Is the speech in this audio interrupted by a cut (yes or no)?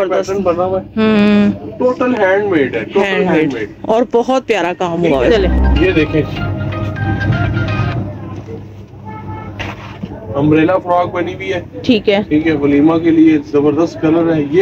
yes